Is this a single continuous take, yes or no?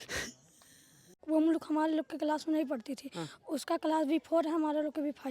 no